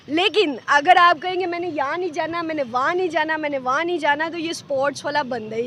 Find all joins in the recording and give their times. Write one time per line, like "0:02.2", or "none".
none

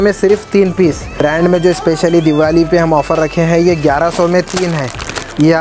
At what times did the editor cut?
0:01.2

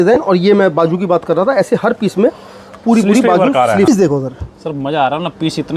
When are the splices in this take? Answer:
0:03.9

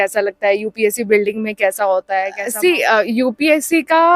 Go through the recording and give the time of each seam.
0:02.3

